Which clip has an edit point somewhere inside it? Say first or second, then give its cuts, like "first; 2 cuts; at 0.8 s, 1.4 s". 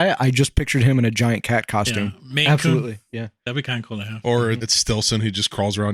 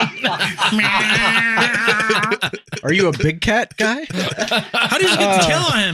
first; 1 cut; at 4.7 s